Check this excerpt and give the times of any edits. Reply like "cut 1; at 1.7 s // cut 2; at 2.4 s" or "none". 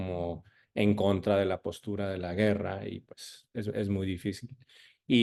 none